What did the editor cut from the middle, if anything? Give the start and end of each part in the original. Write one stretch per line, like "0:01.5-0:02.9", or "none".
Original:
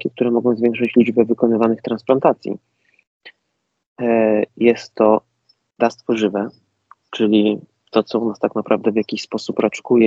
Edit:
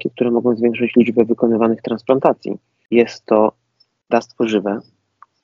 0:02.8-0:04.5